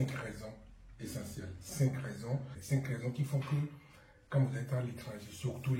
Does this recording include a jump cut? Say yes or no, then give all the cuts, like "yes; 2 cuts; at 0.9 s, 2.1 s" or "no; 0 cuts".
yes; 1 cut; at 2.6 s